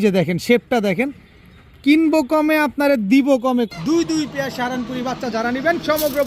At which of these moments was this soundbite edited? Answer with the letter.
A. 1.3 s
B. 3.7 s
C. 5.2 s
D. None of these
B